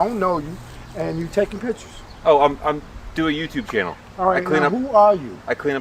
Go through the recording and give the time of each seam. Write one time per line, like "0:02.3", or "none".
none